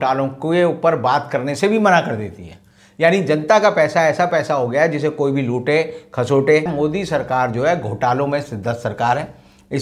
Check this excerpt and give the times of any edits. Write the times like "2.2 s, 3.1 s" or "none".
6.7 s